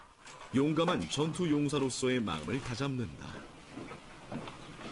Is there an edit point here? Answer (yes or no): no